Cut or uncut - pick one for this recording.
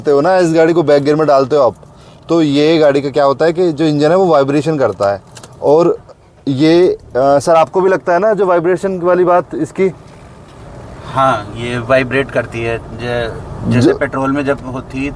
uncut